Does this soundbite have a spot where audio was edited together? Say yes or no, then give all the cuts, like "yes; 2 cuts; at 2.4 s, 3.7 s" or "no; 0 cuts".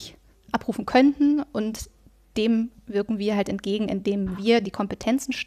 no; 0 cuts